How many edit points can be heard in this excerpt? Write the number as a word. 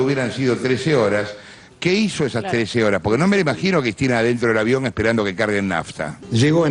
zero